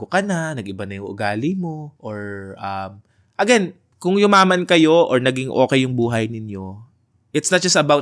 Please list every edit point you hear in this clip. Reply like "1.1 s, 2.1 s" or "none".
1.9 s, 3.8 s